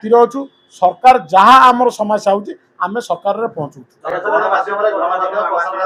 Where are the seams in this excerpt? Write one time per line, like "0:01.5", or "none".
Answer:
none